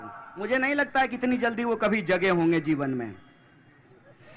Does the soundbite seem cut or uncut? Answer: uncut